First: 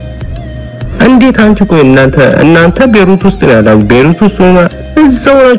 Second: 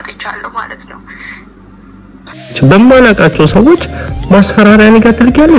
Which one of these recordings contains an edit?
second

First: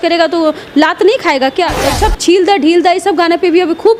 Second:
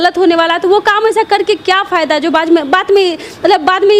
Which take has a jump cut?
first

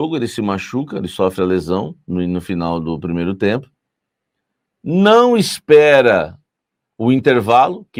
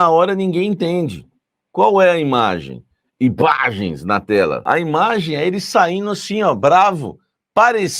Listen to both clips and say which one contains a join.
second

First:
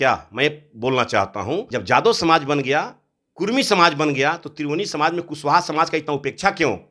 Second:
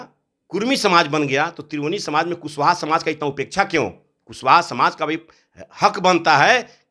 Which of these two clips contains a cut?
first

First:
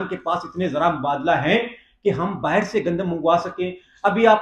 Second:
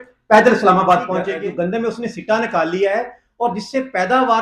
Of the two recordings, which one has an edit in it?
second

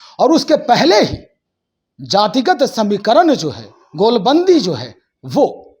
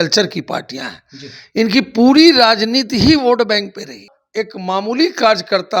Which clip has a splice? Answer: second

